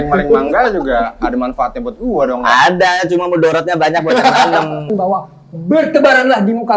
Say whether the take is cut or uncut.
cut